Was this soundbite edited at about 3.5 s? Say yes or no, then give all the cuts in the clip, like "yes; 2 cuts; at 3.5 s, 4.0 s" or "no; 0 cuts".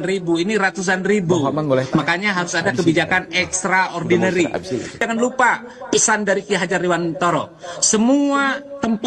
no; 1 cut; at 5.0 s